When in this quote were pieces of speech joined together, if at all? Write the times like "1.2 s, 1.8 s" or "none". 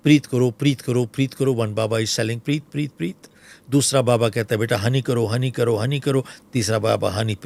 none